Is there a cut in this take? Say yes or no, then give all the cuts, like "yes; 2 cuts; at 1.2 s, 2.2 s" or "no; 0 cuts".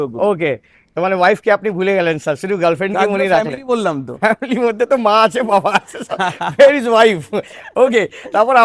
no; 0 cuts